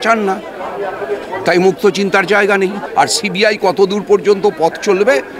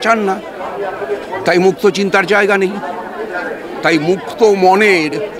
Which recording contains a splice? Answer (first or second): first